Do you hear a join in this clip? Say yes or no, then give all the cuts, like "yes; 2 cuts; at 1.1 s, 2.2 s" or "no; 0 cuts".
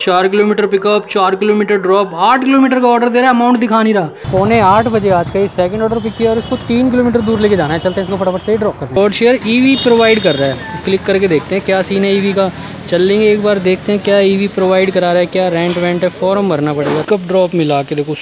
yes; 3 cuts; at 4.2 s, 9.0 s, 17.0 s